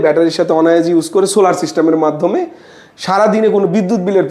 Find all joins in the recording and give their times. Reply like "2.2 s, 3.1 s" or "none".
none